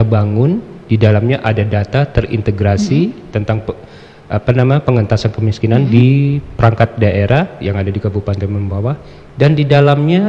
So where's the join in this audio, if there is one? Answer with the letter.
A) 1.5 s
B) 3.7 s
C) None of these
C